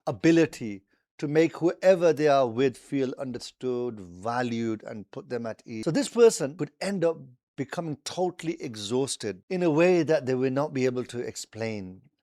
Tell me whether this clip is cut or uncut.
cut